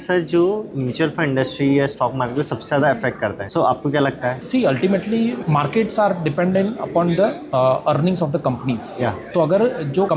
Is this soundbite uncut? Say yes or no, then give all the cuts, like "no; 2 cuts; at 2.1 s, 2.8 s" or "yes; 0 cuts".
yes; 0 cuts